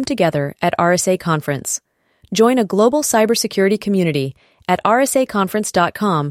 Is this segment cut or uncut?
uncut